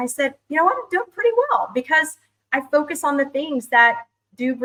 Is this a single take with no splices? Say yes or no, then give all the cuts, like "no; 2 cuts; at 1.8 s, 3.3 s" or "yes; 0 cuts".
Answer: yes; 0 cuts